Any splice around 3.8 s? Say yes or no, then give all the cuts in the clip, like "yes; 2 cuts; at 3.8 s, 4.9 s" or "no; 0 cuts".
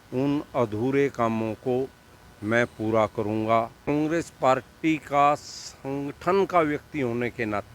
yes; 1 cut; at 3.8 s